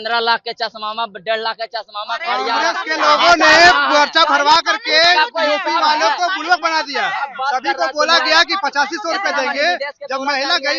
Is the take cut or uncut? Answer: uncut